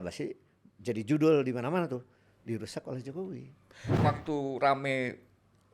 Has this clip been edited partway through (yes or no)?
yes